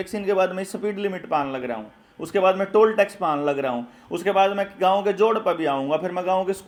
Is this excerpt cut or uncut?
uncut